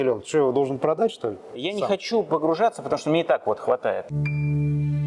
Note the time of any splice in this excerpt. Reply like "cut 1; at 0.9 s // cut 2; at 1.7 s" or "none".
cut 1; at 1.6 s // cut 2; at 4.1 s